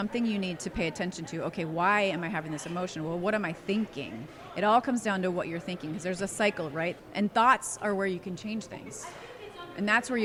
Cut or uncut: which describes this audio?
uncut